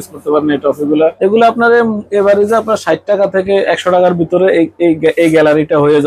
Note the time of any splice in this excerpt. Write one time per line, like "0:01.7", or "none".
0:01.1